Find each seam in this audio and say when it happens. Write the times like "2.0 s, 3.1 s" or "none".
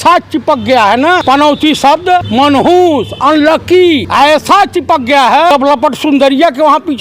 1.2 s, 2.3 s, 4.1 s, 5.5 s